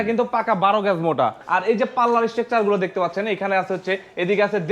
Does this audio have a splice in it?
yes; 1 cut; at 1.4 s

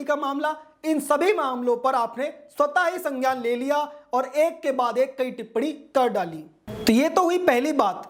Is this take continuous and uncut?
yes; 0 cuts

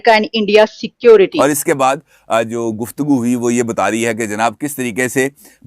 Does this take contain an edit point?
yes; 1 cut; at 1.3 s

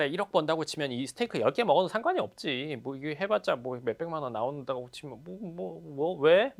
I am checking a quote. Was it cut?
no; 0 cuts

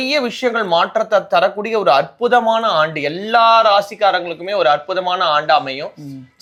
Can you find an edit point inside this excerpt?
no; 0 cuts

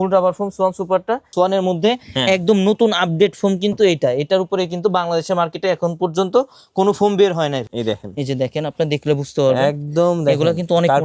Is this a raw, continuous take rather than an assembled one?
no; 2 cuts; at 1.3 s, 7.7 s

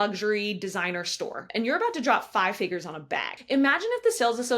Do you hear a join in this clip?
yes; 2 cuts; at 1.5 s, 3.3 s

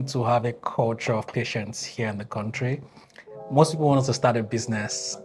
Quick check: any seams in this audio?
no; 0 cuts

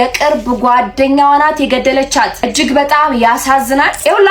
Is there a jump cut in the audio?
no; 0 cuts

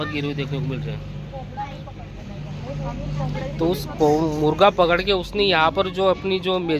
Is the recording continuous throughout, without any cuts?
yes; 0 cuts

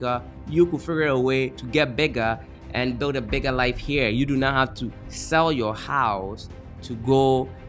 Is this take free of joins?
no; 2 cuts; at 1.6 s, 2.5 s

